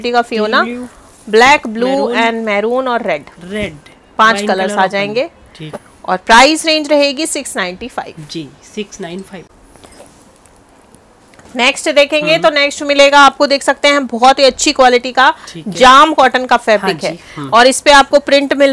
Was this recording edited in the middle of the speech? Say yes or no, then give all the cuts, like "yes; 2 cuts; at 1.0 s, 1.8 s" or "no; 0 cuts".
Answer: no; 0 cuts